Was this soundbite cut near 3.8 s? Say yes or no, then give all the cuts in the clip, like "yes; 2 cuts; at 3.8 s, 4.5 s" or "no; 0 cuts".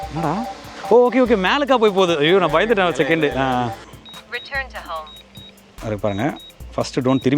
yes; 1 cut; at 3.8 s